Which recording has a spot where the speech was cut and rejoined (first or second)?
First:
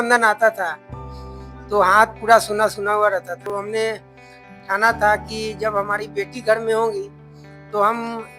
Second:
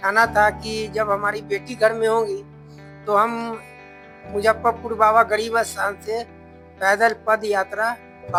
first